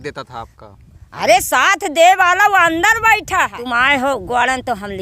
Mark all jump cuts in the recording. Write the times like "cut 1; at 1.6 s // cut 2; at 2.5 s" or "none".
cut 1; at 3.6 s